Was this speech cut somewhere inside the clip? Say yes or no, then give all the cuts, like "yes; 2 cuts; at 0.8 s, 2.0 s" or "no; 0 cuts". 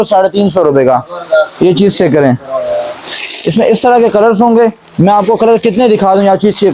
no; 0 cuts